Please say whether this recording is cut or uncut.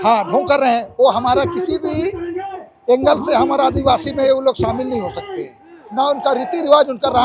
uncut